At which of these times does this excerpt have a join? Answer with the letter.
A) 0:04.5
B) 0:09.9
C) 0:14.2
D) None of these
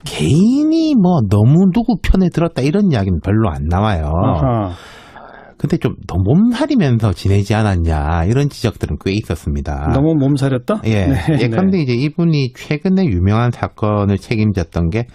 C